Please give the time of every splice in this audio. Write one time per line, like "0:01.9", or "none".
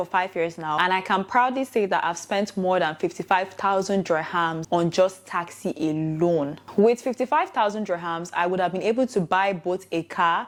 none